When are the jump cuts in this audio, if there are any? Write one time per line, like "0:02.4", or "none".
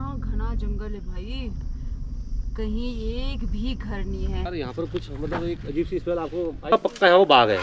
0:04.5
0:06.7